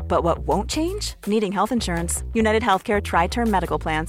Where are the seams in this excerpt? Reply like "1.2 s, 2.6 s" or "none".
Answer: none